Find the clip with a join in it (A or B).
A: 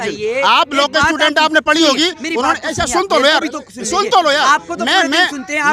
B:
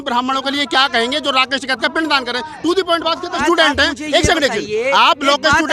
B